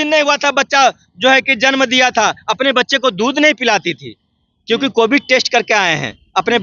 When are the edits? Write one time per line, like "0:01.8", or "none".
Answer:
none